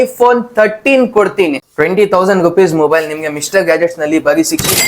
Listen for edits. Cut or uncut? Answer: cut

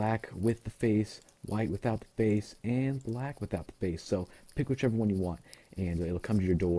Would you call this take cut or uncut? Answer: uncut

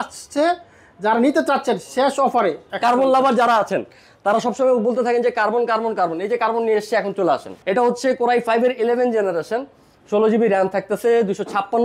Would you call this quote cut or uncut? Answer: cut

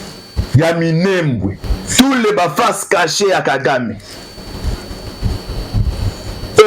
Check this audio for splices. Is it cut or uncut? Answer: cut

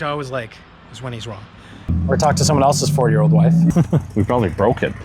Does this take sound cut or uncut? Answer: cut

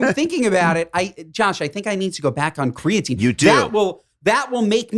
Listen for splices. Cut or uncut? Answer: uncut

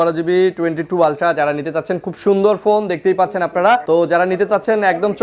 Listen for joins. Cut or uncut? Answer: cut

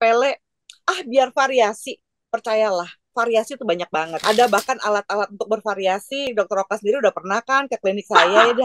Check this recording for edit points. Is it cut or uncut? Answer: cut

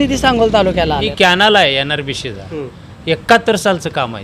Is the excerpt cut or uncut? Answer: cut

